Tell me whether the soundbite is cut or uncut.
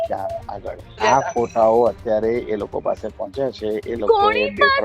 cut